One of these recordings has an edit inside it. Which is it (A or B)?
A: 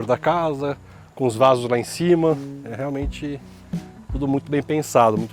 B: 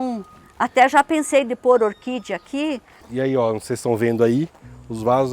B